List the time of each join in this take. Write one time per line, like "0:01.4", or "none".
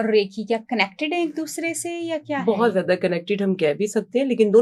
none